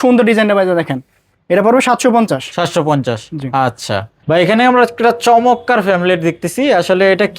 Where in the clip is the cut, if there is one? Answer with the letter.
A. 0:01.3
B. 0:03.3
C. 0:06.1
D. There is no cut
D